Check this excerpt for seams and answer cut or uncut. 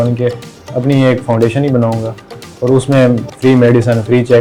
uncut